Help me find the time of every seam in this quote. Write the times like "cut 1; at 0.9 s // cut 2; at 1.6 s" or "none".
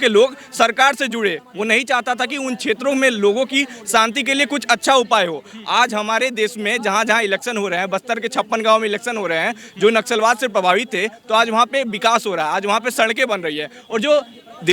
none